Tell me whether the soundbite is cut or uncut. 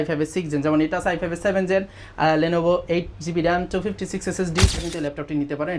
cut